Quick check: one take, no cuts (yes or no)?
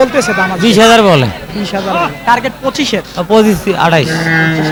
yes